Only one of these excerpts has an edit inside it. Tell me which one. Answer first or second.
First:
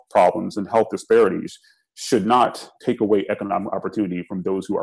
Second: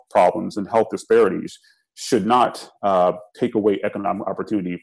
first